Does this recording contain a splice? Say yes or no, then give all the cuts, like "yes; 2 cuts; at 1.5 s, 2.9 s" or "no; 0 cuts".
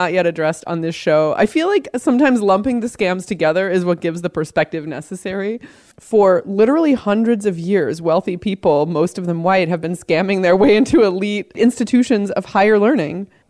yes; 1 cut; at 5.8 s